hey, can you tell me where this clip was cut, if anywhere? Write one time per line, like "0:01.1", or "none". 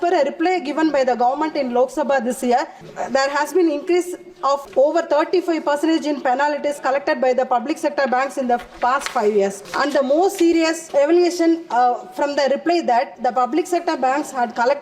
0:02.8
0:04.7
0:09.6
0:10.8
0:13.1